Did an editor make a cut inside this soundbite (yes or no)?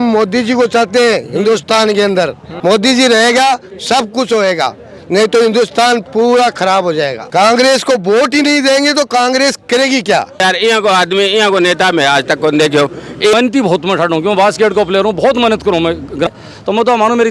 yes